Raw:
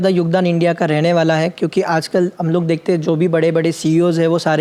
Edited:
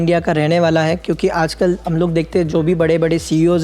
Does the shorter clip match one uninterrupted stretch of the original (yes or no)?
yes